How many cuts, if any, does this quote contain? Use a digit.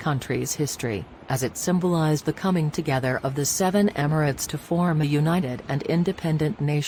0